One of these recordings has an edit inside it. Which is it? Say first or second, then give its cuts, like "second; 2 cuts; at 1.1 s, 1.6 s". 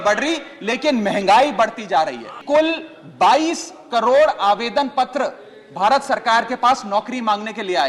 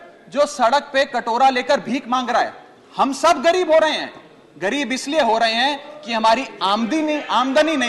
first; 1 cut; at 2.4 s